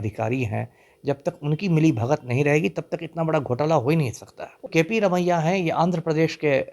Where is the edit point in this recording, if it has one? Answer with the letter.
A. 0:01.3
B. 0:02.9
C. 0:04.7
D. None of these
C